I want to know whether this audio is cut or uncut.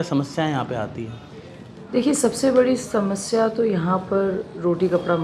uncut